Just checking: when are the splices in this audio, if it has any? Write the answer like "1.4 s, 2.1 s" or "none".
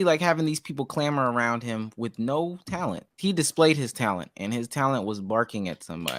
3.1 s

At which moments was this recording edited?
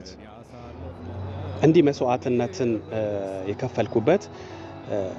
none

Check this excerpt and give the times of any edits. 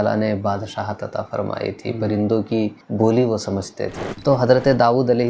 2.8 s, 4.1 s

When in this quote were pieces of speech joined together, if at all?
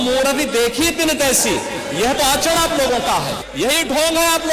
3.4 s

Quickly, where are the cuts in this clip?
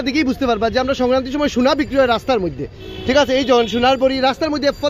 none

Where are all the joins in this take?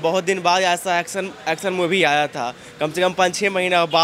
none

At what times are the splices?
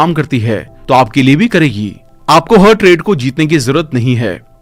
none

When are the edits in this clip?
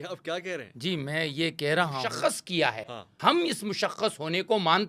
2.1 s

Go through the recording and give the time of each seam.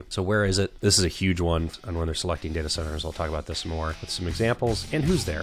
1.7 s

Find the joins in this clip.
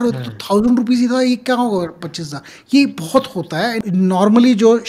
3.8 s

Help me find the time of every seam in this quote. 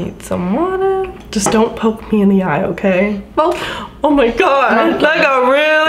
none

